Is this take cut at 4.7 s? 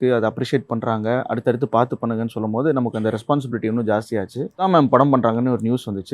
yes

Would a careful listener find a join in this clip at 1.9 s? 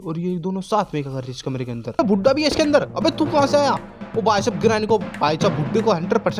yes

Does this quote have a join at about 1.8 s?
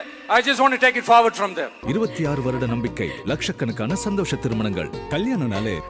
yes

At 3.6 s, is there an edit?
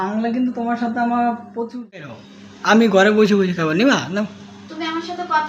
no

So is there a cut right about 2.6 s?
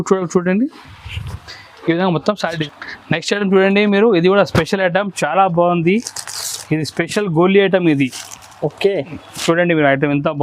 yes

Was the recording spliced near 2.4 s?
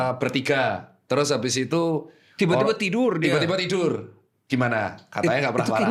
no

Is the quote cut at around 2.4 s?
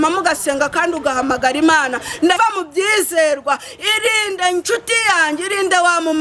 yes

